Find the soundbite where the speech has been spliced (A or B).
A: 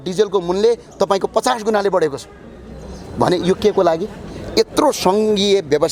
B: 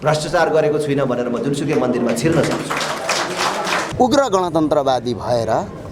B